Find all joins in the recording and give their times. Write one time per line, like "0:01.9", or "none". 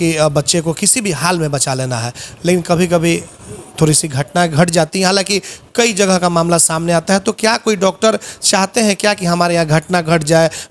none